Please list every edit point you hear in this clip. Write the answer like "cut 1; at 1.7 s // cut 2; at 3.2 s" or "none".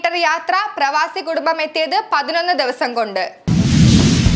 cut 1; at 3.4 s